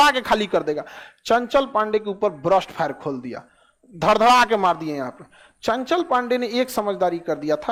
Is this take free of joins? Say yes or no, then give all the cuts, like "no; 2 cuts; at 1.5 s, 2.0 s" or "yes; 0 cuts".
yes; 0 cuts